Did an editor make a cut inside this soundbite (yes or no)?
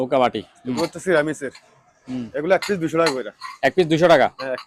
no